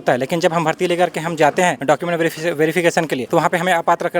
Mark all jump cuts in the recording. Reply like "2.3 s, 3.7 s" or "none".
1.8 s, 3.2 s